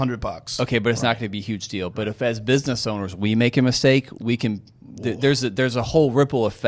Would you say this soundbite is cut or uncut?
uncut